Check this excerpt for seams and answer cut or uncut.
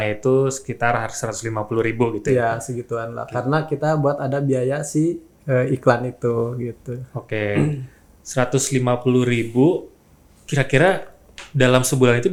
uncut